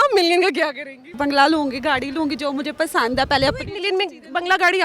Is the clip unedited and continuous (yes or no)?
no